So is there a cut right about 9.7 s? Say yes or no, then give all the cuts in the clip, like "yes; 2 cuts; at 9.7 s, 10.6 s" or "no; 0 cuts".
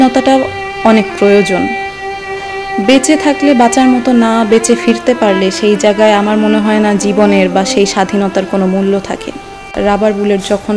yes; 1 cut; at 9.7 s